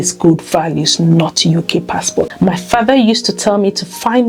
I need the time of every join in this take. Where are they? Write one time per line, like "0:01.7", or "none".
0:02.3